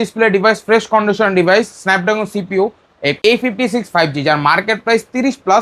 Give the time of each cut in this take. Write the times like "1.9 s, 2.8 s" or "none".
3.2 s